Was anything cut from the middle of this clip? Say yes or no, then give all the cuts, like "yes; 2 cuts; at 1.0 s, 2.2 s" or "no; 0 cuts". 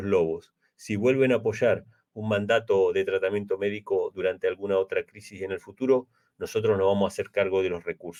no; 0 cuts